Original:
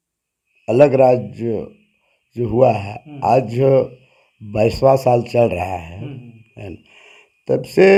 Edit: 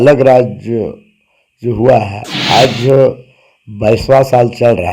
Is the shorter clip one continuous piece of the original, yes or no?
yes